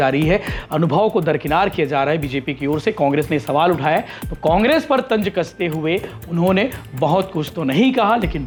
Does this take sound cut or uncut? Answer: uncut